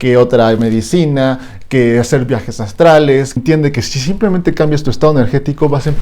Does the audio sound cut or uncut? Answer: cut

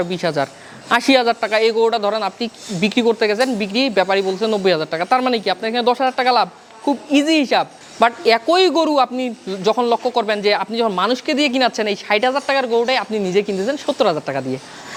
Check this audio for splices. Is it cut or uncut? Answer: uncut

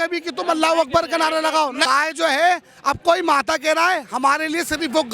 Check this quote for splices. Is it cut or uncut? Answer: cut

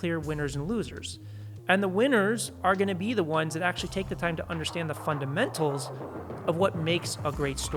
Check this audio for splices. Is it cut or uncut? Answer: uncut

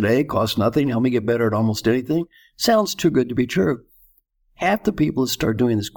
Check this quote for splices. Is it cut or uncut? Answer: uncut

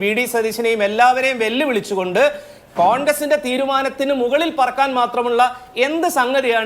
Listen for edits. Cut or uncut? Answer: uncut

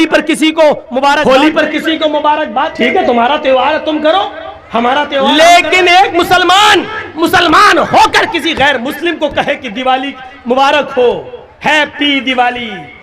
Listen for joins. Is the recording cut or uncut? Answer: cut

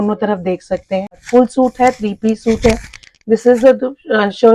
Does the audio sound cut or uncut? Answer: cut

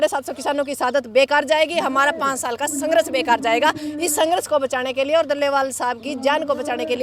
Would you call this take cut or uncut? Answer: uncut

